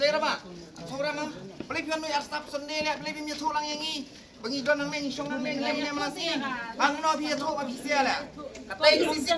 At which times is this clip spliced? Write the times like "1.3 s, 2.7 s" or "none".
none